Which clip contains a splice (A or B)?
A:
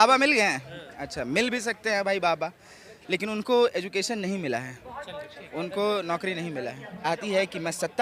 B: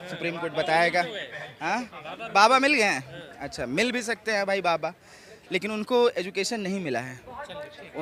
A